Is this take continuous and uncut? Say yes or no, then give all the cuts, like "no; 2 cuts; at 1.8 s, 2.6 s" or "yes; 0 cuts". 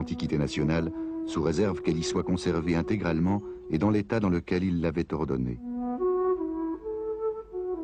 yes; 0 cuts